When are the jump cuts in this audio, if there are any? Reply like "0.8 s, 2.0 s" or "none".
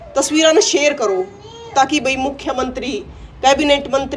none